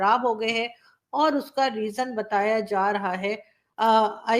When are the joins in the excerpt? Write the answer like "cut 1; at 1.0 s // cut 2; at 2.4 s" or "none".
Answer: none